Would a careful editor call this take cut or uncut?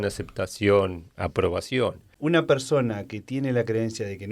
cut